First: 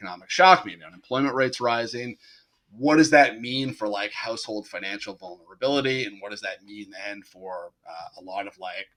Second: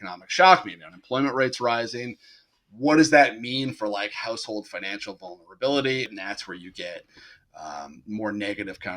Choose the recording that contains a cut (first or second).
second